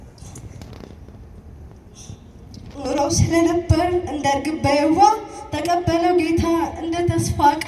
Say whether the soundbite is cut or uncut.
uncut